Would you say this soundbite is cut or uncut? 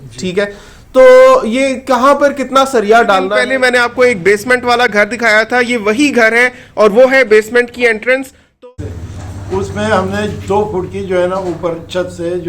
cut